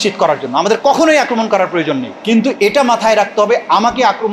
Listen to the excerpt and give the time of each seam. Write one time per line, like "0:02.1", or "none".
0:02.1